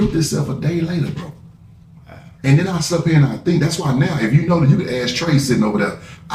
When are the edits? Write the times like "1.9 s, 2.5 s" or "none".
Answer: none